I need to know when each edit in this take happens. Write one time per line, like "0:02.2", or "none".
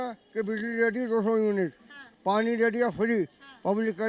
none